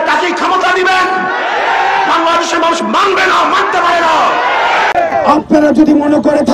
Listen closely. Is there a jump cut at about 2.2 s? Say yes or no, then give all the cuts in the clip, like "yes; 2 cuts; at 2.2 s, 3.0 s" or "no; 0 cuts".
no; 1 cut; at 5.2 s